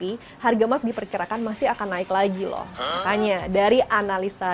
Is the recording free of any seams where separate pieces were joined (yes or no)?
no